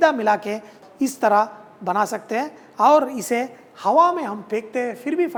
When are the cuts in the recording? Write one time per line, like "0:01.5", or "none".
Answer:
none